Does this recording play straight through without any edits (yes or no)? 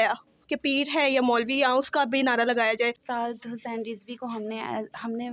no